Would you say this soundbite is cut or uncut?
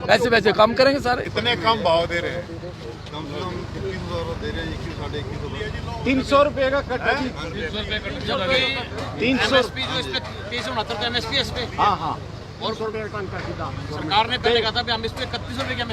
cut